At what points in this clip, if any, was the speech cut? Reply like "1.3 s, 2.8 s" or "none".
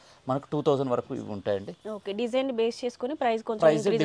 none

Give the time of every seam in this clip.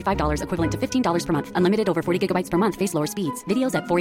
none

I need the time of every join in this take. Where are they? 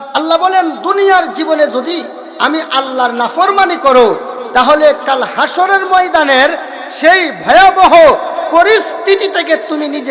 none

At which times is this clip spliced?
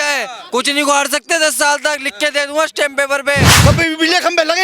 3.5 s

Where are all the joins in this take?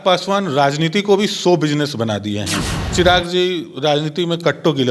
2.9 s

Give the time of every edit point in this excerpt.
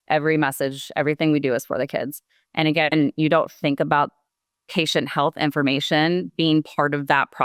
none

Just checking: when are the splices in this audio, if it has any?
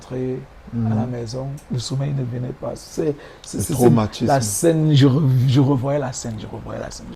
none

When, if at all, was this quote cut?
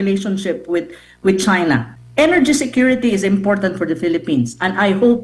2.0 s

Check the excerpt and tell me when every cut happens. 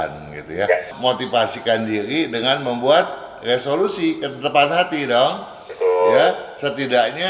0.9 s

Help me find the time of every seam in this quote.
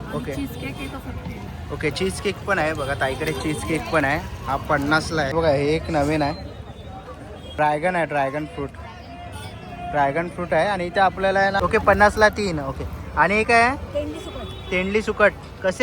5.3 s, 11.6 s

